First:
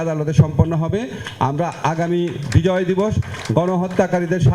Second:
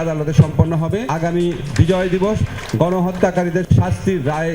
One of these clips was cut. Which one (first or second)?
second